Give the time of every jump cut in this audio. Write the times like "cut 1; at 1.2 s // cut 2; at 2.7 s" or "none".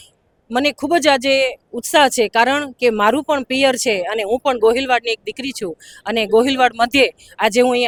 none